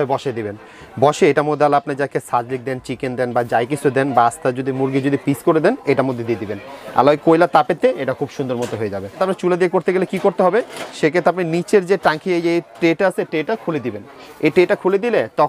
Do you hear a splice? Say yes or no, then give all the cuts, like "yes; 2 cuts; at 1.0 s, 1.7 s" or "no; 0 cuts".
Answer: yes; 1 cut; at 9.2 s